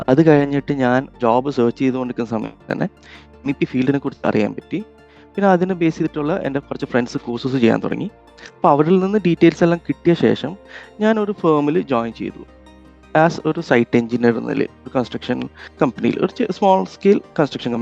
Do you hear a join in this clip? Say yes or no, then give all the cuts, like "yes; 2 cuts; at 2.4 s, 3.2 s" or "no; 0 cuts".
yes; 1 cut; at 1.1 s